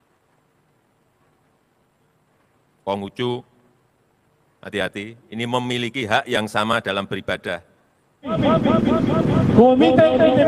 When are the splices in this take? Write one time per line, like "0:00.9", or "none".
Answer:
0:08.3